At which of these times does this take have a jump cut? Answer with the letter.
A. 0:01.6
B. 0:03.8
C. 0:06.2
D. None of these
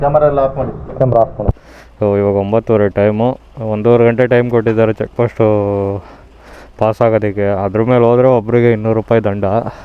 A